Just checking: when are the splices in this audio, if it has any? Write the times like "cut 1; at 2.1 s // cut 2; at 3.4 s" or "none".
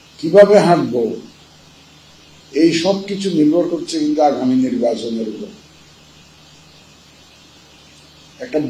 none